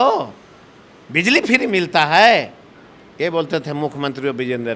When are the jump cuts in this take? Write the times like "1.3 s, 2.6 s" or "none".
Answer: none